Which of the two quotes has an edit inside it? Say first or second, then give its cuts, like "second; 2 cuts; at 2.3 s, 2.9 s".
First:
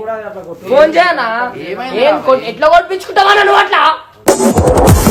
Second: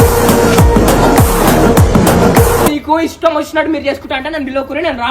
second; 1 cut; at 2.7 s